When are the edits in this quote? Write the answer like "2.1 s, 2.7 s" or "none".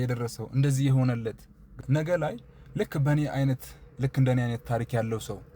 1.7 s